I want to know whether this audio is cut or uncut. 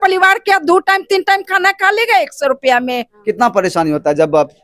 cut